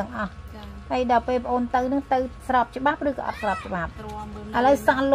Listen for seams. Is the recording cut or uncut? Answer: cut